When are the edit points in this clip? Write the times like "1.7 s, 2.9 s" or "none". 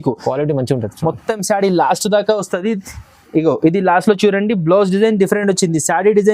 none